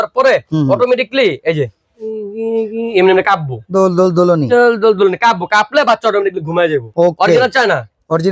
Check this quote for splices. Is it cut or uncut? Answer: cut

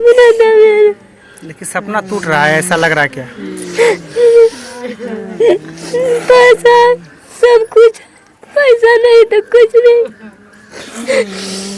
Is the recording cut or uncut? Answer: uncut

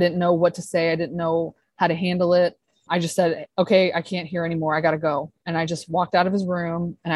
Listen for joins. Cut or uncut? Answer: cut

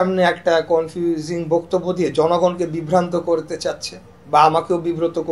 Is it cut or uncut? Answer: uncut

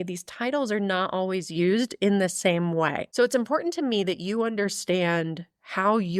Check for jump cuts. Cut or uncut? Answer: cut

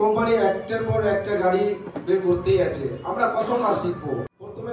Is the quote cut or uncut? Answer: uncut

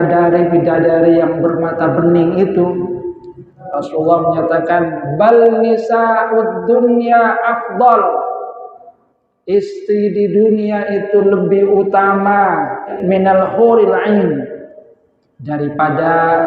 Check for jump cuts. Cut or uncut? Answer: cut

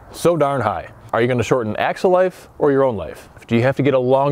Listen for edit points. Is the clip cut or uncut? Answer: cut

